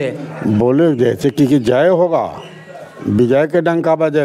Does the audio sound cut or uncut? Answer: uncut